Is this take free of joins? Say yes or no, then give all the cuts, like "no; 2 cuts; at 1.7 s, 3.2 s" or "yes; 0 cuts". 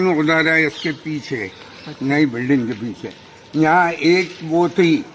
yes; 0 cuts